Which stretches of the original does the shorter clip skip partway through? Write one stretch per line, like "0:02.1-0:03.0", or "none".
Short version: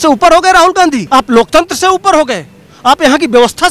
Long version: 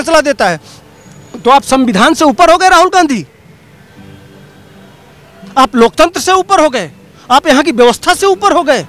0:03.2-0:05.5